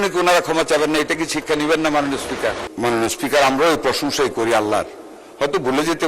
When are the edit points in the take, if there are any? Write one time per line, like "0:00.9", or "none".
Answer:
0:02.7